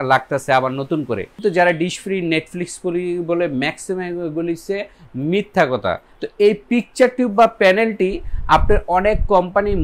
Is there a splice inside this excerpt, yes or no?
yes